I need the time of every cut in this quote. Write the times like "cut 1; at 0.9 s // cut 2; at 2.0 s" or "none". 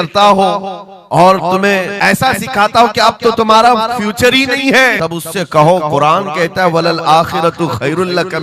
cut 1; at 1.9 s // cut 2; at 5.0 s